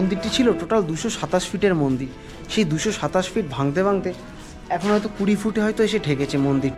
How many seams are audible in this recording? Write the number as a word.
zero